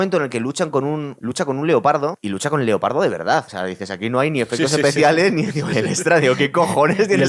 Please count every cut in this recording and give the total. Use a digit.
3